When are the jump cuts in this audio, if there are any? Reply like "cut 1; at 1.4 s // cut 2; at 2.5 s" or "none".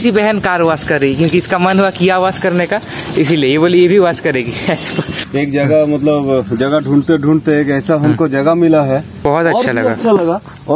cut 1; at 5.3 s // cut 2; at 9.1 s